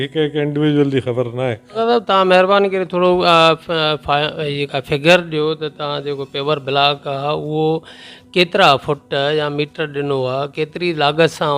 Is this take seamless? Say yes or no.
no